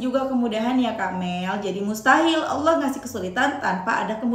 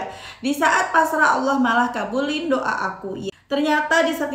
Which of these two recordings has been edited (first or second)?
second